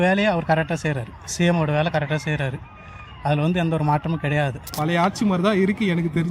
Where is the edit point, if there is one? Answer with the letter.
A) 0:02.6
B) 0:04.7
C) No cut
B